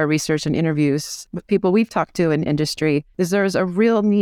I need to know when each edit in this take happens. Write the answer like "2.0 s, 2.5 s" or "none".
1.3 s, 3.1 s